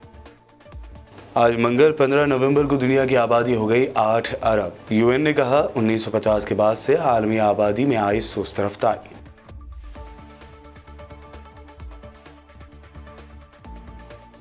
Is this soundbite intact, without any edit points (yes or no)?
no